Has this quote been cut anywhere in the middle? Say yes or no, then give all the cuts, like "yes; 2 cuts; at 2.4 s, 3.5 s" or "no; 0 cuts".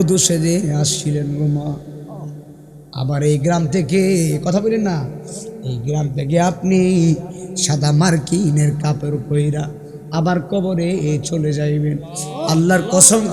no; 0 cuts